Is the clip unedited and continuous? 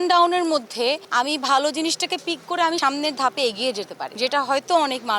no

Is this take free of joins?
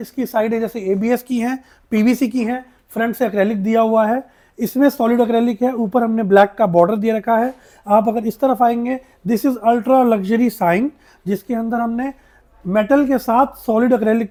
yes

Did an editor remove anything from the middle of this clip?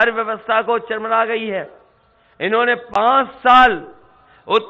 no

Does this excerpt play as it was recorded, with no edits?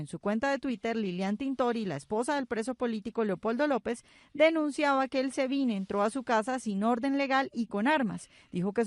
no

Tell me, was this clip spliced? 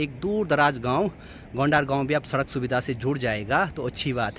no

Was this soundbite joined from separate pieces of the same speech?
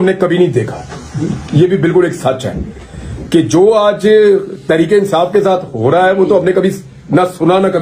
no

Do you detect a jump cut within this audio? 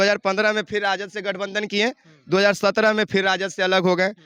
no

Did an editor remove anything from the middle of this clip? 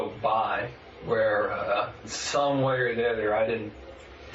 yes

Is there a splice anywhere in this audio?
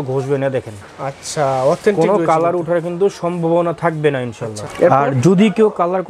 no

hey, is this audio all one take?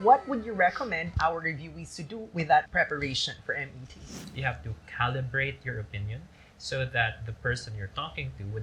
no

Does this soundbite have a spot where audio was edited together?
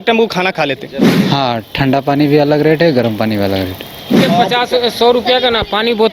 yes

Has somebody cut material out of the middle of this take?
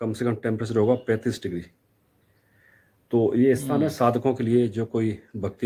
no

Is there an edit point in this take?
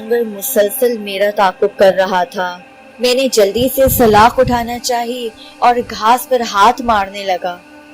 no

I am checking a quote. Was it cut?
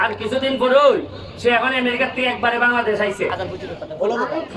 yes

